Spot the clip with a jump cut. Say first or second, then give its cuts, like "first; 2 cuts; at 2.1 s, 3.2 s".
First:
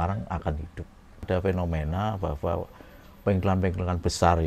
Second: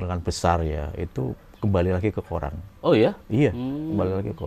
first; 1 cut; at 1.2 s